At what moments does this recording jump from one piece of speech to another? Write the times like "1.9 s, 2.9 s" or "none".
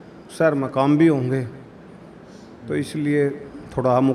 none